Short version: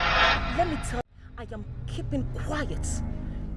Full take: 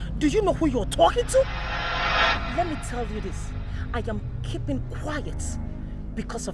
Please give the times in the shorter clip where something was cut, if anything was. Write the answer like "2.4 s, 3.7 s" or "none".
1.0 s